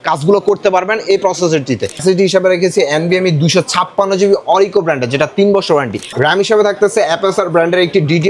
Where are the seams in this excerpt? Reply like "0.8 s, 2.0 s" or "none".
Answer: 2.0 s, 6.1 s